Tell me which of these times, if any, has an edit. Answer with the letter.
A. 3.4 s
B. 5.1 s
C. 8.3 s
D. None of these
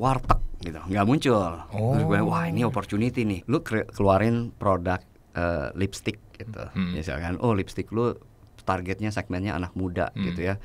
A